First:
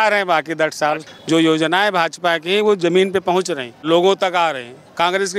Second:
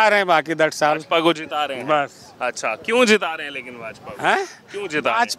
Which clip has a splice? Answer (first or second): first